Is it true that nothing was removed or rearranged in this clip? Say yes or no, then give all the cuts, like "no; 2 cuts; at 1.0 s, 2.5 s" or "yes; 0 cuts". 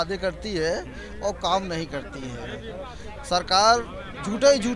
yes; 0 cuts